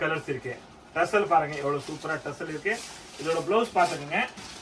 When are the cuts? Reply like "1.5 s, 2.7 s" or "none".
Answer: none